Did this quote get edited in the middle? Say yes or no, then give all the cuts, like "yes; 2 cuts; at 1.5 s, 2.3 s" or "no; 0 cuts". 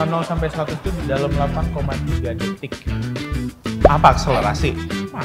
no; 0 cuts